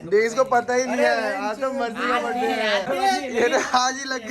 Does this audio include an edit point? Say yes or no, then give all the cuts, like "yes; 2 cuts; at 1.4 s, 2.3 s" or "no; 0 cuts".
yes; 1 cut; at 2.8 s